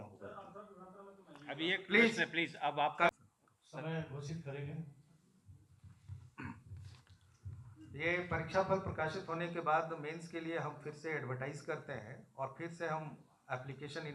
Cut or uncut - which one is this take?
cut